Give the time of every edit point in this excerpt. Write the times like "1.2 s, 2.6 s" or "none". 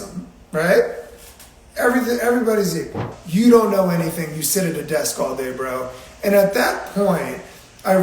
3.1 s